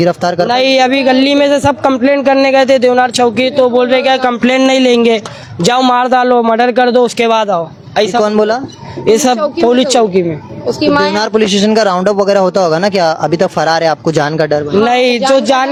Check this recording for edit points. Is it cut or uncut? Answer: uncut